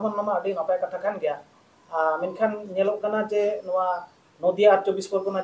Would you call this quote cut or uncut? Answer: uncut